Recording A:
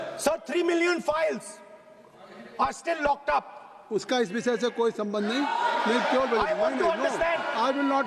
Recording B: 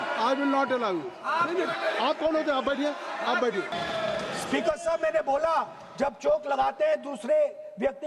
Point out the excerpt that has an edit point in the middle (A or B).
B